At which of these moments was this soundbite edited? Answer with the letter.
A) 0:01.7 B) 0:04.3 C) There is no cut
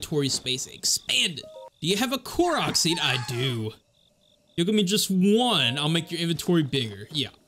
A